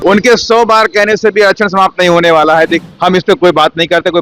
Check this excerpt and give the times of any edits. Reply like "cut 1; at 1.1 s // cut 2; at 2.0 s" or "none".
cut 1; at 2.8 s